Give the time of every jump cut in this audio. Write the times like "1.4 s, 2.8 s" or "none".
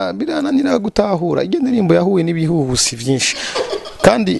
none